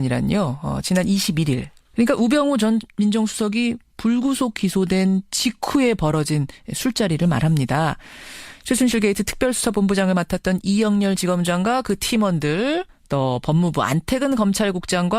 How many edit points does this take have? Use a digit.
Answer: 1